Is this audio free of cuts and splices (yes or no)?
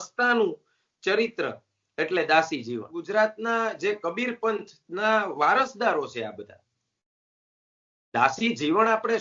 no